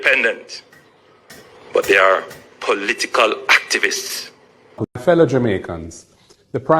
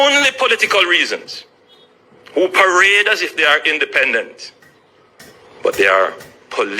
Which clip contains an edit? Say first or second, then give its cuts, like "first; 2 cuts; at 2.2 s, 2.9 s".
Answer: first; 1 cut; at 4.7 s